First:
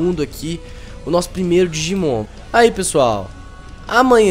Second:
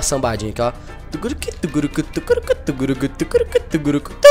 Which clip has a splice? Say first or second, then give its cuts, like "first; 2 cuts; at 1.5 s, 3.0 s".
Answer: first; 1 cut; at 2.2 s